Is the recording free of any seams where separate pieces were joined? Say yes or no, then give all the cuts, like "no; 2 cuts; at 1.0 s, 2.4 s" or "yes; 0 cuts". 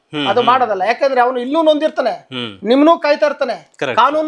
yes; 0 cuts